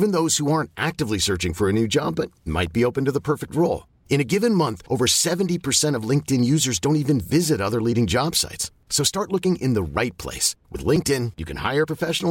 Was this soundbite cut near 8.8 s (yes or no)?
no